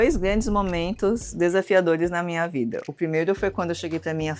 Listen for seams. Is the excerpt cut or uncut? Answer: uncut